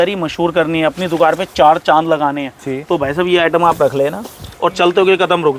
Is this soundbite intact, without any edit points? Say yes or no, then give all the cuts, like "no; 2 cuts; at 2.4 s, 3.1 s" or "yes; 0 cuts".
yes; 0 cuts